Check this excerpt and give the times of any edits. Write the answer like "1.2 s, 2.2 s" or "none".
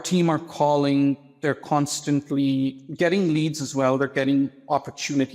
2.8 s